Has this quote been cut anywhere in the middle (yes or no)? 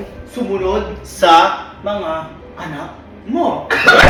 no